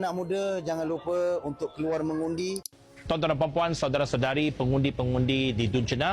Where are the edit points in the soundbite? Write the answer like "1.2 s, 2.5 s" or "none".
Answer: 2.7 s

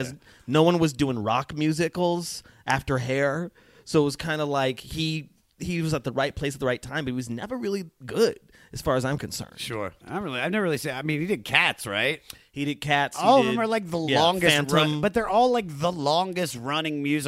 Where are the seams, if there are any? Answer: 10.0 s

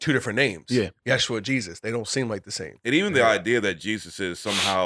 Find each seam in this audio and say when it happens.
none

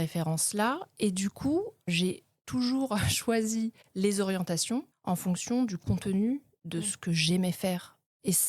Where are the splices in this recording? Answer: 1.9 s, 3.8 s, 4.9 s

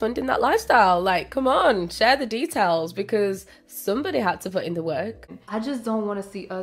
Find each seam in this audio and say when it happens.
5.3 s

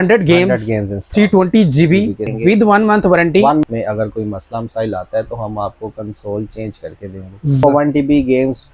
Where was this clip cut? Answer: 2.3 s, 3.6 s, 7.6 s

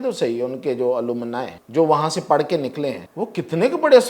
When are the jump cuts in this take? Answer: 1.6 s, 3.1 s

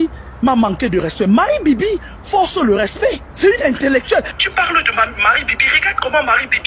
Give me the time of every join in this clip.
3.3 s, 4.3 s

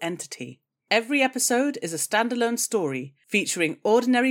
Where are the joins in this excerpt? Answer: none

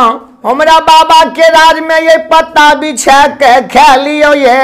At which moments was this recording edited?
none

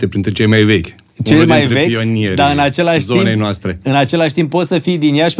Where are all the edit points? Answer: none

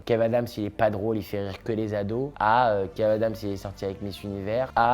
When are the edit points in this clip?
none

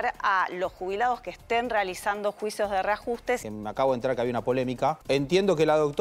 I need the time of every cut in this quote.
3.4 s, 5.0 s

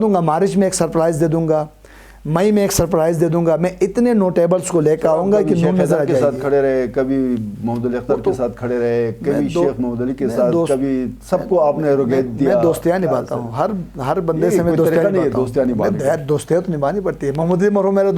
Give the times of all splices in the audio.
none

